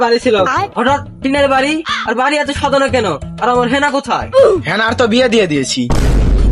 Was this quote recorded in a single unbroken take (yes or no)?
yes